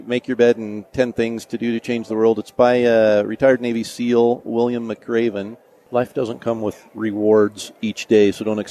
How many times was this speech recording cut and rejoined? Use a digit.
1